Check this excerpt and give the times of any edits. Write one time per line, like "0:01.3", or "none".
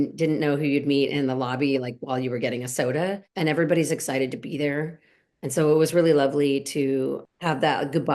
0:03.3
0:07.2